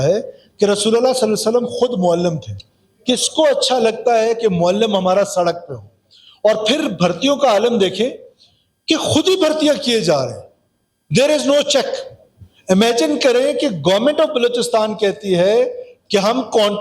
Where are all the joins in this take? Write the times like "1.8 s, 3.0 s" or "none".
none